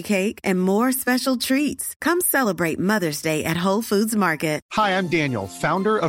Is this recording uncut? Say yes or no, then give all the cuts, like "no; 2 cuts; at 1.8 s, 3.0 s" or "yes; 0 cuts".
no; 1 cut; at 4.6 s